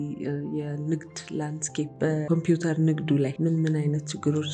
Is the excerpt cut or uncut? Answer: cut